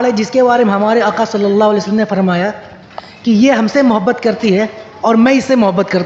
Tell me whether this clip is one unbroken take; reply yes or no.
yes